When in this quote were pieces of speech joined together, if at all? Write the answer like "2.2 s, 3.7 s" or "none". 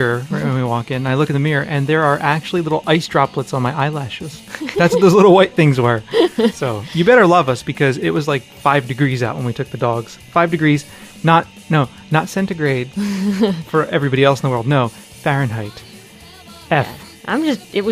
6.5 s